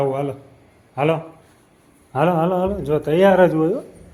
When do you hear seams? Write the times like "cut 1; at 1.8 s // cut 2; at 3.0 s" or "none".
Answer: none